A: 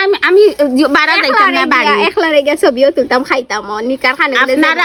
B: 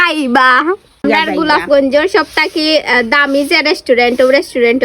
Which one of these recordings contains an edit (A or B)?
B